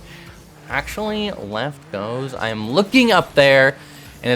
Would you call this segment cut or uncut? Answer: uncut